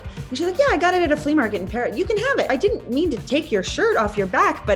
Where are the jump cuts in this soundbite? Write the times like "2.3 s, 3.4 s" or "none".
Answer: 2.5 s